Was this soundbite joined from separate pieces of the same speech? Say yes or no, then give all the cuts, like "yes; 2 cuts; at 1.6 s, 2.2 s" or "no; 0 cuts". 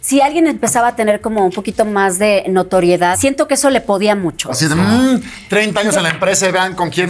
yes; 2 cuts; at 3.2 s, 4.5 s